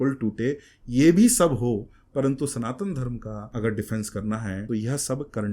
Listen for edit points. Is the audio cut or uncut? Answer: cut